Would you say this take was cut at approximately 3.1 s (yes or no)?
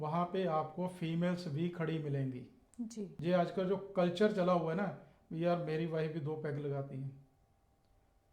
yes